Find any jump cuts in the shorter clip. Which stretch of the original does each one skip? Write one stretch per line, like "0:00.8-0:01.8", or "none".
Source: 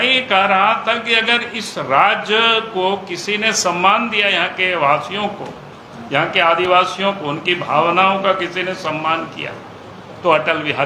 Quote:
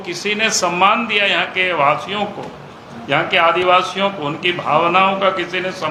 none